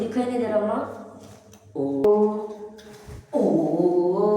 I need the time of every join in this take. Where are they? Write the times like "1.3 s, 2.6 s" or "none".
2.0 s